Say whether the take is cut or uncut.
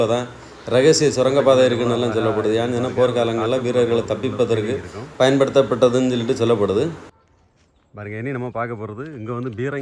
uncut